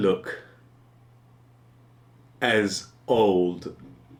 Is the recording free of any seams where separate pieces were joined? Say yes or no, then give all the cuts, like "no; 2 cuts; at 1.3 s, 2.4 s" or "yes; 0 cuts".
yes; 0 cuts